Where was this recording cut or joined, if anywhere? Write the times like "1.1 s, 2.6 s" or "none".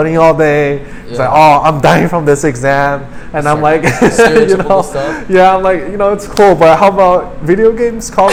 none